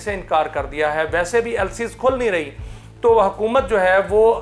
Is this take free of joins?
yes; 0 cuts

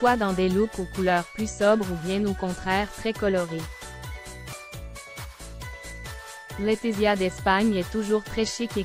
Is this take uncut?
yes; 0 cuts

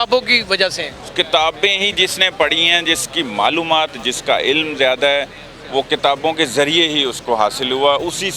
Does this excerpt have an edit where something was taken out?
no; 0 cuts

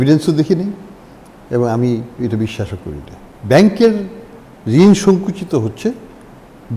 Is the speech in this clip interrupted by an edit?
no; 0 cuts

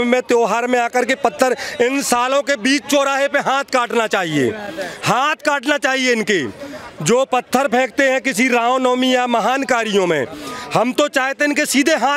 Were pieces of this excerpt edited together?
no; 0 cuts

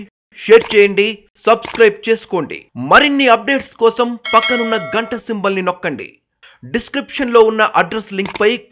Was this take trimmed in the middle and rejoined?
no; 0 cuts

